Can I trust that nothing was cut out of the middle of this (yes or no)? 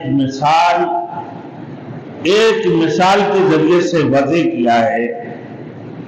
yes